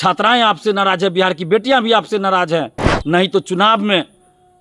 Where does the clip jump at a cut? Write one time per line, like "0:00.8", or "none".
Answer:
0:02.9